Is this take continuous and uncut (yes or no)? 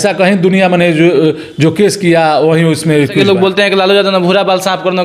no